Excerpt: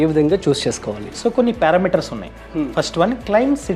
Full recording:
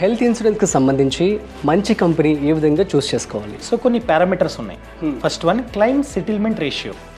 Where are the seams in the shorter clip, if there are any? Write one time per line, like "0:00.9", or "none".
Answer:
none